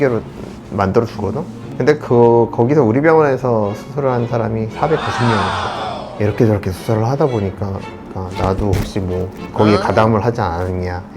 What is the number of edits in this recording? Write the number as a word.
two